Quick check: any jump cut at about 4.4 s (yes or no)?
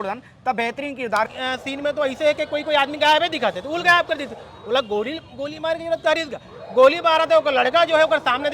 no